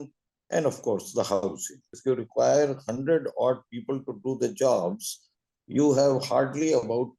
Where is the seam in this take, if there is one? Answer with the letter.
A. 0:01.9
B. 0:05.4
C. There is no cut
A